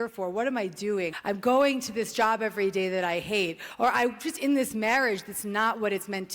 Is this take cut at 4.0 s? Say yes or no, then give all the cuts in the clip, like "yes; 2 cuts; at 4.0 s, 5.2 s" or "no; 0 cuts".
no; 1 cut; at 1.2 s